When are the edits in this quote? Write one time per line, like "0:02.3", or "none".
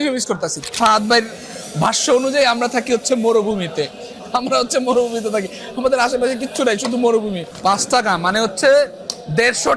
0:00.8
0:07.5